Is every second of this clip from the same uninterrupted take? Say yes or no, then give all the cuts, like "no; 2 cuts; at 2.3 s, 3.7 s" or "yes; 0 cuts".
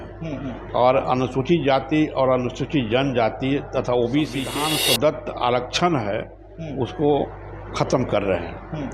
no; 1 cut; at 4.5 s